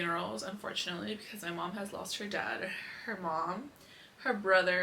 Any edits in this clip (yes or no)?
no